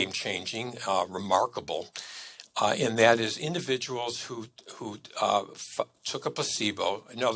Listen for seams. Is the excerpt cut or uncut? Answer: uncut